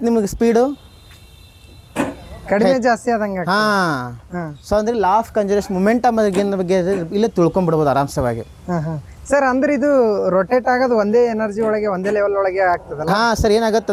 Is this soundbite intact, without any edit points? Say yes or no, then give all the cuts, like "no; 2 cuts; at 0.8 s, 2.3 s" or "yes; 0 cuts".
yes; 0 cuts